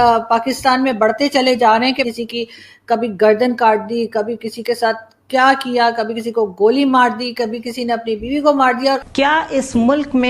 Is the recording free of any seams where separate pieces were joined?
no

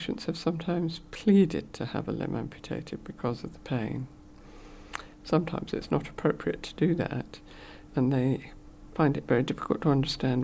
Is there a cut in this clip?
no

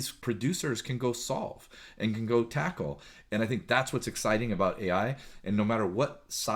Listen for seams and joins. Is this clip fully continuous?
yes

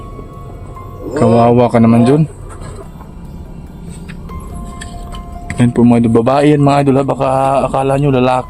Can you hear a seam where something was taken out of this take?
yes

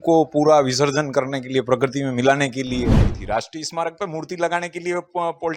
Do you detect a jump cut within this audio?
yes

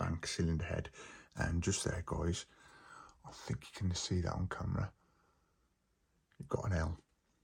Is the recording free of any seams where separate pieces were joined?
yes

